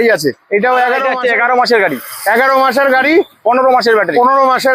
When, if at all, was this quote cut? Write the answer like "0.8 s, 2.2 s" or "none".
1.1 s